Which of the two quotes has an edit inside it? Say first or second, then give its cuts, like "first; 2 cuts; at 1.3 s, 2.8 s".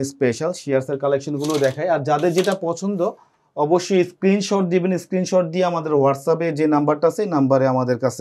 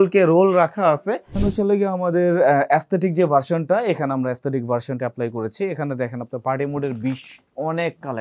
second; 1 cut; at 1.4 s